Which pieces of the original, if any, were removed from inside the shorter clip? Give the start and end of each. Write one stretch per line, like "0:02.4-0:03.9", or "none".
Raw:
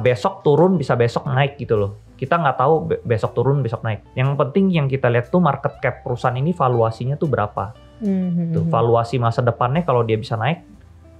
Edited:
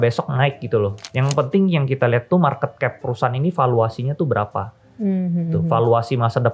0:02.0-0:04.1